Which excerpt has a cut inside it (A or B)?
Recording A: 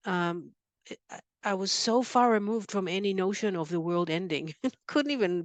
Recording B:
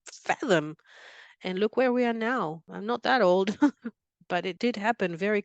B